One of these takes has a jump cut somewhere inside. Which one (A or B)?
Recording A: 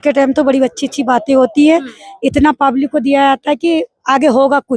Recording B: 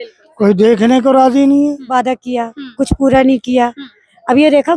B